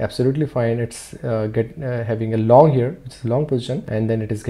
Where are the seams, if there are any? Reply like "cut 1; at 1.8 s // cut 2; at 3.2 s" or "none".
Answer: none